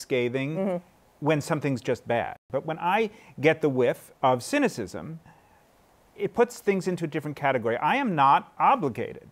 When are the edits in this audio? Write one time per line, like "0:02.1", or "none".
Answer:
0:02.4
0:04.1